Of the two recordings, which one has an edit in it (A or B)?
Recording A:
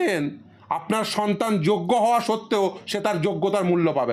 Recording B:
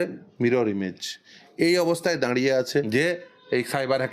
B